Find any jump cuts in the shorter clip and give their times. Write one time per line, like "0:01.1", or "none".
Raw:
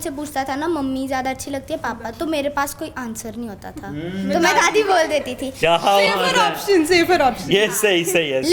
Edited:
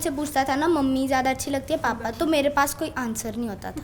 none